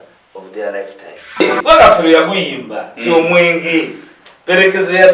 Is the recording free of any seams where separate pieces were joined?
no; 1 cut; at 1.4 s

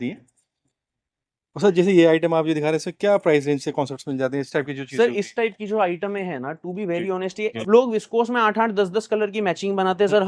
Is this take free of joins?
no; 1 cut; at 7.6 s

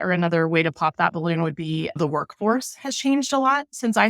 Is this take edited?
yes; 1 cut; at 2.0 s

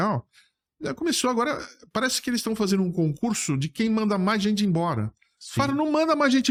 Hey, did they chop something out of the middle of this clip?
no; 0 cuts

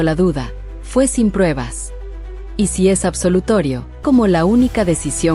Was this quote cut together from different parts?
yes; 1 cut; at 4.0 s

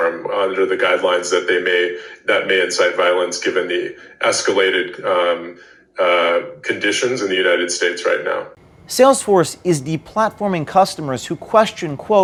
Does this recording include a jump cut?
no; 0 cuts

